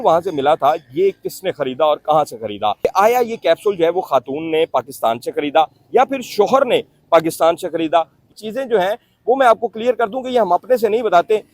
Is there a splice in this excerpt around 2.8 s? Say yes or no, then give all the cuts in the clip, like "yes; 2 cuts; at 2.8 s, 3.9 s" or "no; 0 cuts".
yes; 2 cuts; at 2.8 s, 8.2 s